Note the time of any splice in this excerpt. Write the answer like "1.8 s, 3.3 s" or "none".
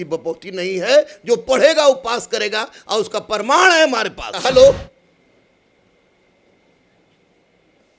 4.3 s